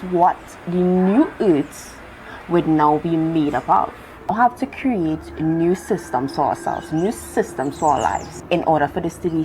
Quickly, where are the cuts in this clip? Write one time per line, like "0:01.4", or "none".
0:04.3
0:08.3